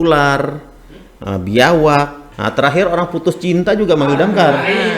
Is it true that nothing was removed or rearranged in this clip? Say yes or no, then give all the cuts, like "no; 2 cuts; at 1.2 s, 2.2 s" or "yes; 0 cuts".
no; 1 cut; at 2.2 s